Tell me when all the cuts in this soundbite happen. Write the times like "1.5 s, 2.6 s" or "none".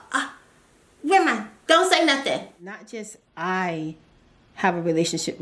2.9 s